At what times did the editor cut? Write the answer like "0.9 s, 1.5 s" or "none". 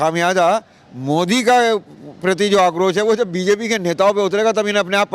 none